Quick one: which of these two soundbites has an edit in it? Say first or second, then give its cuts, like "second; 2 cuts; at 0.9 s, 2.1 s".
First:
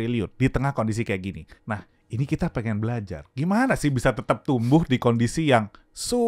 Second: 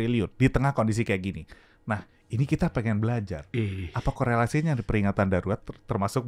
first; 2 cuts; at 1.5 s, 3.2 s